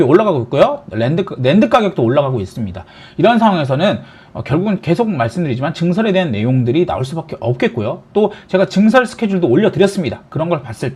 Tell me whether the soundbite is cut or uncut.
uncut